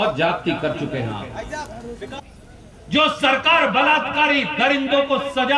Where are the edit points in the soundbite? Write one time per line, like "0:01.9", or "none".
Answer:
0:02.2